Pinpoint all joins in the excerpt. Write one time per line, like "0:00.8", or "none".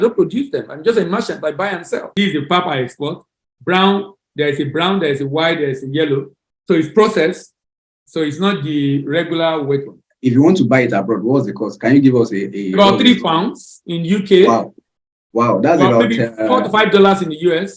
0:02.0
0:10.0